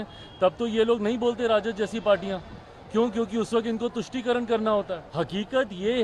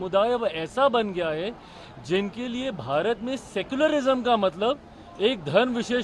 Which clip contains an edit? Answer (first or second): first